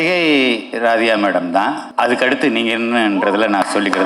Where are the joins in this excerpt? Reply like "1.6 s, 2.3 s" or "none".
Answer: 1.8 s